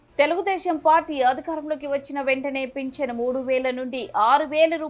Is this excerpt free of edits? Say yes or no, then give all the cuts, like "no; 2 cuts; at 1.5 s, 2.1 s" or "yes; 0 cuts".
yes; 0 cuts